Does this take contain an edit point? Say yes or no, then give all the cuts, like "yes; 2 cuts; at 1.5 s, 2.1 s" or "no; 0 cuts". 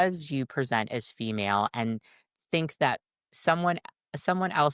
no; 0 cuts